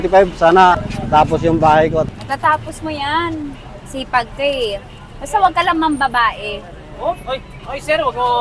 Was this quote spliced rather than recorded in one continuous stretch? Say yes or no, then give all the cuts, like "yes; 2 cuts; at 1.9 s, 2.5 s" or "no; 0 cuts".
yes; 2 cuts; at 0.9 s, 2.1 s